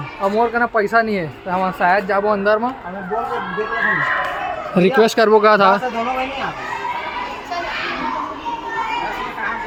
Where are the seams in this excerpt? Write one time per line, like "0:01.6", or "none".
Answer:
none